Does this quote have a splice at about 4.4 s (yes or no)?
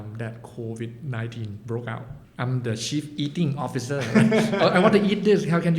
no